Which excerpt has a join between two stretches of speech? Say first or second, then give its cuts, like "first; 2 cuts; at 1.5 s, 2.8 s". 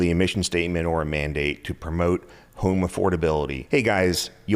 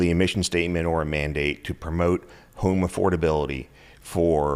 first; 1 cut; at 3.6 s